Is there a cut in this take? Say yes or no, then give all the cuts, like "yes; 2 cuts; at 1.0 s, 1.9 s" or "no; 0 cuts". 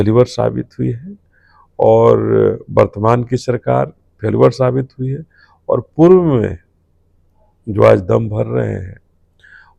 no; 0 cuts